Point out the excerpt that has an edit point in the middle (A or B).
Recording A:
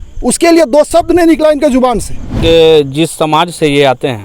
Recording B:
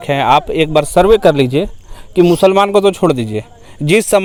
A